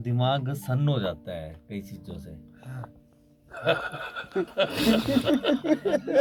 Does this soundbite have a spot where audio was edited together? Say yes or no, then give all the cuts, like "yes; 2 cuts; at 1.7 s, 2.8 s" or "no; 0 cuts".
no; 0 cuts